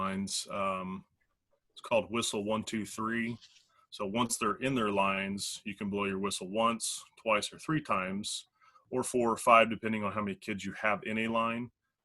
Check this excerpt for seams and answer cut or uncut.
uncut